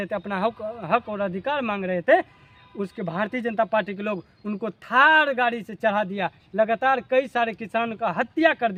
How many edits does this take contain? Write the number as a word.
zero